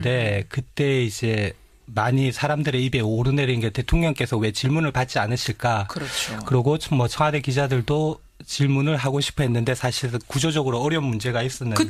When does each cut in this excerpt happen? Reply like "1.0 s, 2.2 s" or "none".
none